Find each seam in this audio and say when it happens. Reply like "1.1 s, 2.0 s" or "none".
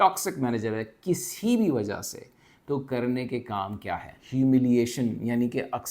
4.2 s